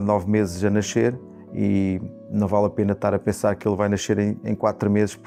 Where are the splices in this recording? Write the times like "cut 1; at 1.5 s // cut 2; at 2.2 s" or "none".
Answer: none